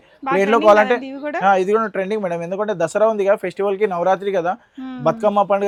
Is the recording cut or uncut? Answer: uncut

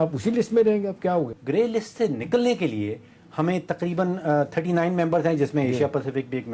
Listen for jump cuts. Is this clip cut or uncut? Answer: cut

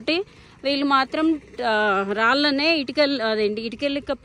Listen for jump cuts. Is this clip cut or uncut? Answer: uncut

